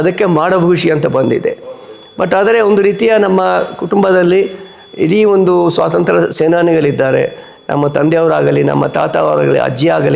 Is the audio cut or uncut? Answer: uncut